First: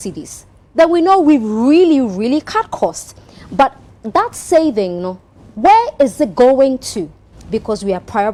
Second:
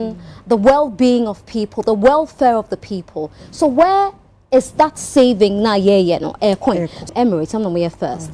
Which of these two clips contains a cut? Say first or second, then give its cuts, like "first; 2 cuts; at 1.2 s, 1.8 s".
second; 1 cut; at 7.1 s